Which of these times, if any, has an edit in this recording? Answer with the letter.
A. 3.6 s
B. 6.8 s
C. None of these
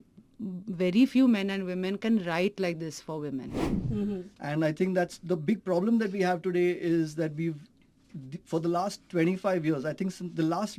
A